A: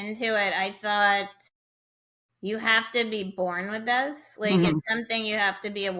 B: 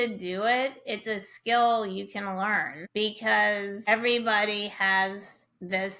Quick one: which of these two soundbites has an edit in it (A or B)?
B